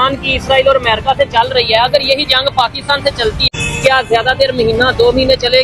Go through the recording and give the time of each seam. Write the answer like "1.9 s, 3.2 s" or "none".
3.5 s